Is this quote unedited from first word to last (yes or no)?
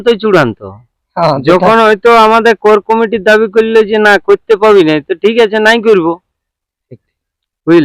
yes